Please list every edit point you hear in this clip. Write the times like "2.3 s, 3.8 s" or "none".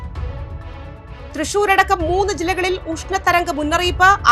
1.3 s